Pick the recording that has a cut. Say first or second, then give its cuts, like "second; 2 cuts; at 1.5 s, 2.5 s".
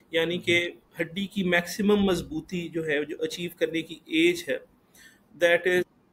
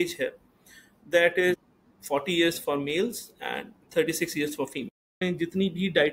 second; 1 cut; at 5.2 s